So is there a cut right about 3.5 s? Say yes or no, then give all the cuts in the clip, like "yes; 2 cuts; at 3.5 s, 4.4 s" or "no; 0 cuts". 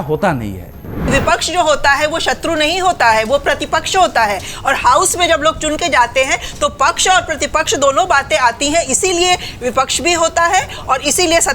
no; 1 cut; at 1.1 s